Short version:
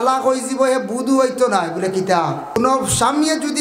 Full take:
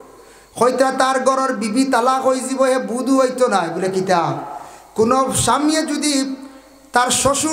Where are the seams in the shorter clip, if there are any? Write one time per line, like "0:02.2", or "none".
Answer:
0:02.6